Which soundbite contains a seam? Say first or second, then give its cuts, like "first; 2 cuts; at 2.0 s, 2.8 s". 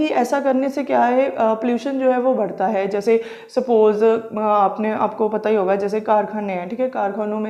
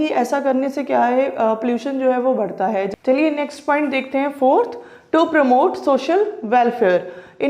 second; 1 cut; at 2.9 s